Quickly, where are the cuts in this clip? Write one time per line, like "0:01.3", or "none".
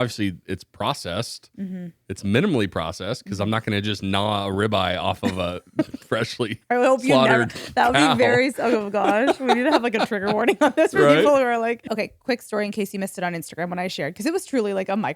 0:11.8